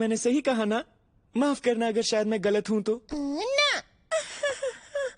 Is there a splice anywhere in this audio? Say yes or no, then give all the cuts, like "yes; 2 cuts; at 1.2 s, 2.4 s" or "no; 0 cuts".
no; 0 cuts